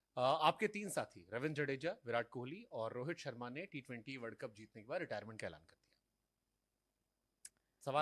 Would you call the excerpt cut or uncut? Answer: uncut